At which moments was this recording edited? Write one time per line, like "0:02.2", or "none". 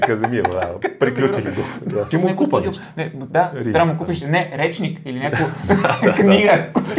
0:02.1